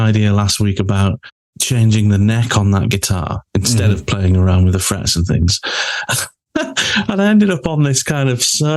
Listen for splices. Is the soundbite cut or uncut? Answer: cut